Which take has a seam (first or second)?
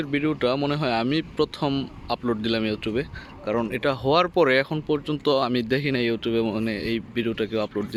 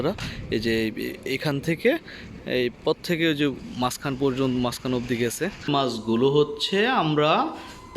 second